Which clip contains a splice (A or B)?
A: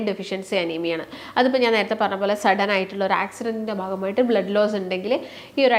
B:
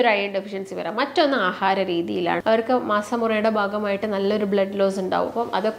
B